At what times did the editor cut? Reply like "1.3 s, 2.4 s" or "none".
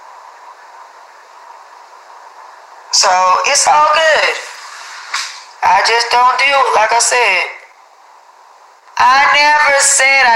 6.1 s